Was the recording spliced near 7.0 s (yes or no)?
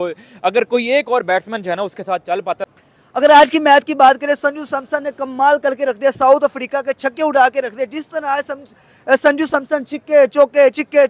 no